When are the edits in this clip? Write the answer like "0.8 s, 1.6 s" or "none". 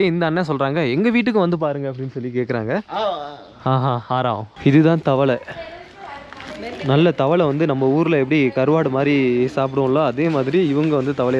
4.5 s